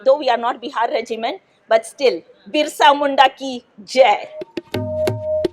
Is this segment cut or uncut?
cut